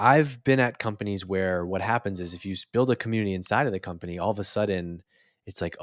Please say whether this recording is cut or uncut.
uncut